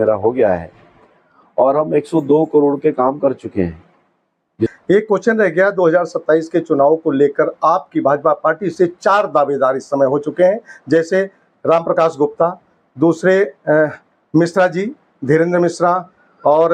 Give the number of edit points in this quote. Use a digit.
1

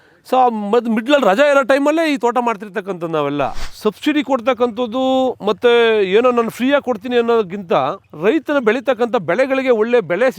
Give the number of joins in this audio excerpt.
2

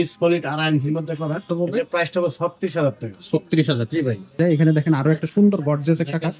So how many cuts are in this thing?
2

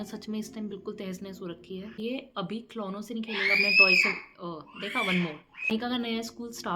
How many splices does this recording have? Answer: 2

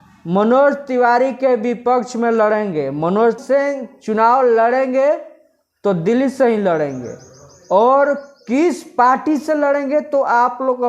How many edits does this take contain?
1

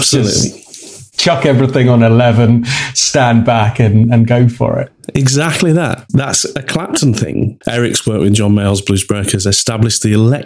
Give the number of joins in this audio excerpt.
2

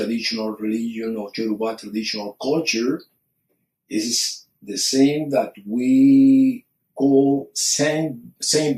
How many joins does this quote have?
1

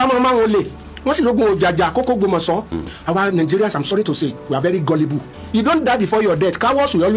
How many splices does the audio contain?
2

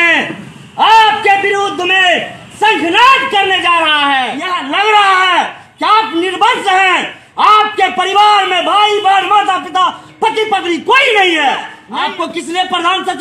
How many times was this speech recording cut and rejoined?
2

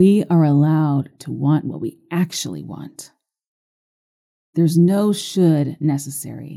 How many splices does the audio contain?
0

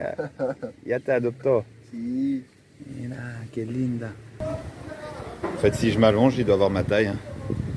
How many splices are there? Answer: 1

